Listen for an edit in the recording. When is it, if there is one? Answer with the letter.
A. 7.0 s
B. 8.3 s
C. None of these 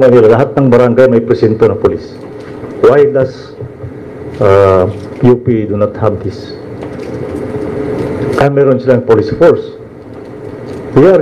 C